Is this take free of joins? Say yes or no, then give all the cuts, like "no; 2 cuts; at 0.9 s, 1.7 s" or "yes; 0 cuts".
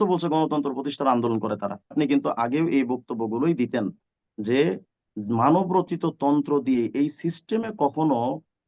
no; 1 cut; at 1.9 s